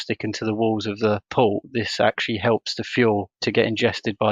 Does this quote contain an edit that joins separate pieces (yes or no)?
yes